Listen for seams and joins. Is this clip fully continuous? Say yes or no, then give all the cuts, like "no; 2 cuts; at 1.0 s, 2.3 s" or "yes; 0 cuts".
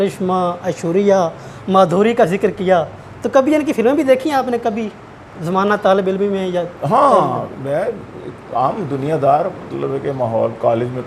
yes; 0 cuts